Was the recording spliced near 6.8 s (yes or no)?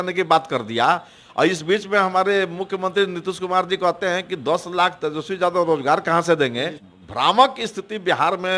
yes